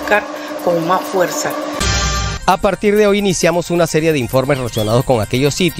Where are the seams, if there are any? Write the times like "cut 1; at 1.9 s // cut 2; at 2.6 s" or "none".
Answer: cut 1; at 1.8 s